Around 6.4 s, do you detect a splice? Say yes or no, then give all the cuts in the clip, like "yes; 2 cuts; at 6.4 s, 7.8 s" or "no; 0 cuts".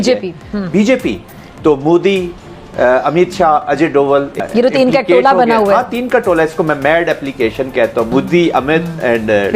no; 2 cuts; at 4.4 s, 8.1 s